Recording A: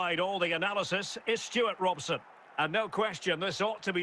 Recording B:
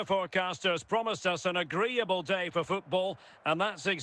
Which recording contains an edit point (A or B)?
A